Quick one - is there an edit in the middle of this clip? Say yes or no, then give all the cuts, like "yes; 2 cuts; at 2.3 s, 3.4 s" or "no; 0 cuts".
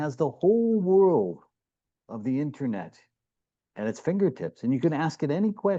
no; 0 cuts